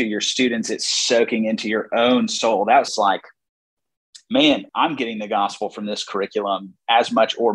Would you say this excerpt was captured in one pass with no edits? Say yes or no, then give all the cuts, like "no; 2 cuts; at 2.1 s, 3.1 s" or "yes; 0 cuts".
no; 2 cuts; at 2.9 s, 4.6 s